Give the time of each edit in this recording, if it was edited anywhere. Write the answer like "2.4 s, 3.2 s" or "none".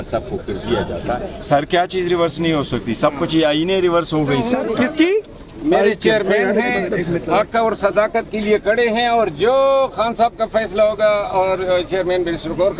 1.3 s, 4.6 s